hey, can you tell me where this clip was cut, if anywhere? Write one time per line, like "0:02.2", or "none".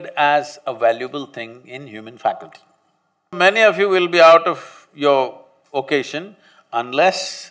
0:03.3

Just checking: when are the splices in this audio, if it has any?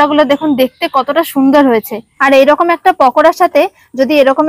0:02.0

